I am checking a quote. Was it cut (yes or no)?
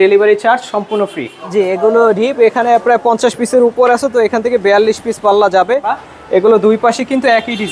yes